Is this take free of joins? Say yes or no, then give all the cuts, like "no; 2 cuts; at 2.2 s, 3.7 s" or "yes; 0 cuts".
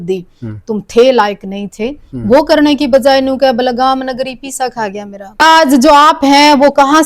no; 1 cut; at 5.4 s